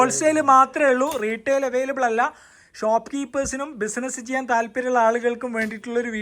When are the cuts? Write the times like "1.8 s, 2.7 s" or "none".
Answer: none